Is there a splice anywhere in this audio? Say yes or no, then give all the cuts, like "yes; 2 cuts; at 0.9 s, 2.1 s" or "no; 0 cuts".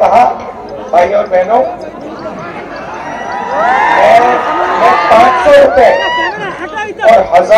no; 0 cuts